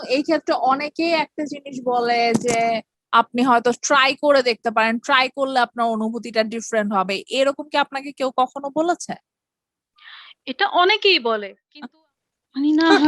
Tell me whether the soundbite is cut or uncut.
cut